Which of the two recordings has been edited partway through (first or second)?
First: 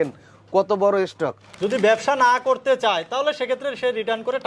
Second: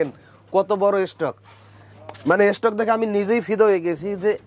first